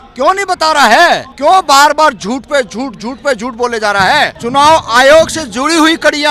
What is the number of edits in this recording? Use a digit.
2